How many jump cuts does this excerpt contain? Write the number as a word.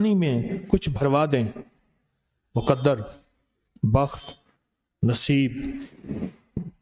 zero